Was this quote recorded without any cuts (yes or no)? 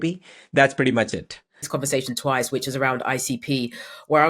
no